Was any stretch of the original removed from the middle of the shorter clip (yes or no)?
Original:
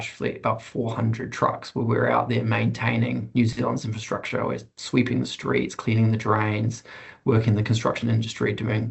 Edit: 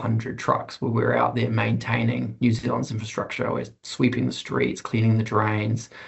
no